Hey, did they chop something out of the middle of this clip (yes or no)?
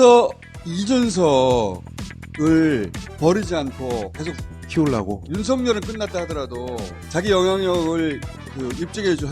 no